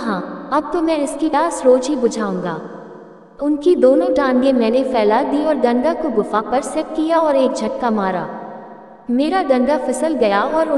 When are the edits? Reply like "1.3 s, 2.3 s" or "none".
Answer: 1.3 s